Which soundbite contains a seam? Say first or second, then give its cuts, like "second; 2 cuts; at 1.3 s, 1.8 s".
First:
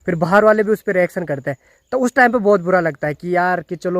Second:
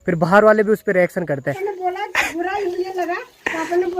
second; 1 cut; at 1.9 s